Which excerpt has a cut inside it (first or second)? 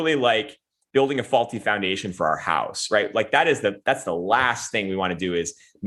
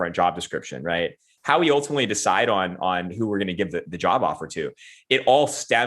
second